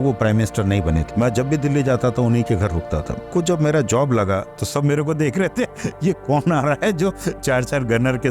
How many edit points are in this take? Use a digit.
3